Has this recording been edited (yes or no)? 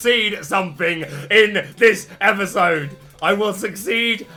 no